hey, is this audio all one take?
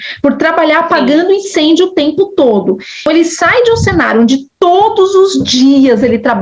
no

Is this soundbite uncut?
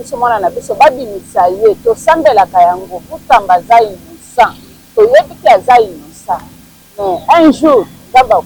yes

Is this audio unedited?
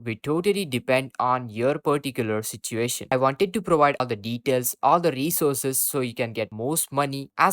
no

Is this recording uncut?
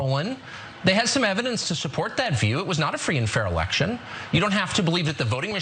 yes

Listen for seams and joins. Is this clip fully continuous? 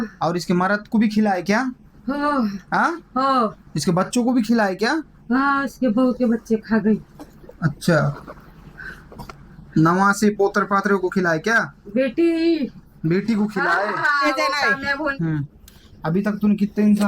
no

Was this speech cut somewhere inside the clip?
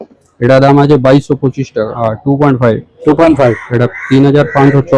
yes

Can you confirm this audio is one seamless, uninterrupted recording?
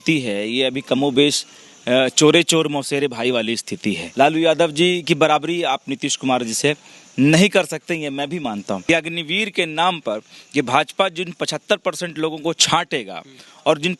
no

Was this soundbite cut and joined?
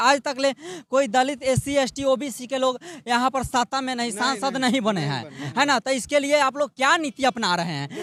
no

